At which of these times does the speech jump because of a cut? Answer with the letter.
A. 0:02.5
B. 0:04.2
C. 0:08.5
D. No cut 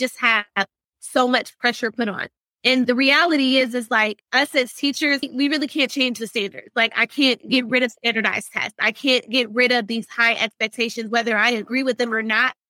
A